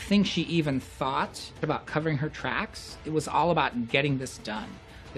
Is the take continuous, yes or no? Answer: no